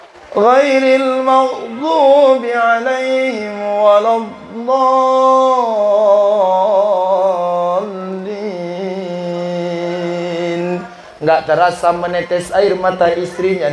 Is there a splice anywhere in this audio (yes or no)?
no